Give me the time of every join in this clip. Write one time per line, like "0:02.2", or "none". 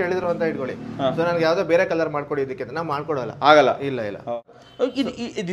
0:04.5